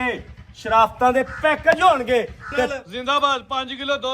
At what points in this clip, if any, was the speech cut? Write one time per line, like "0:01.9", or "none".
0:02.7

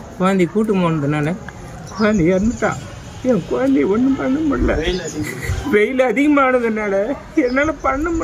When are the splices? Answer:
none

